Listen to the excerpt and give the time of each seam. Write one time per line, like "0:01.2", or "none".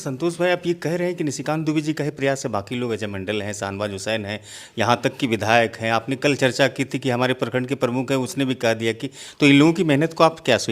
none